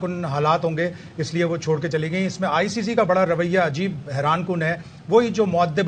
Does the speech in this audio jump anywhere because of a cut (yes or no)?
no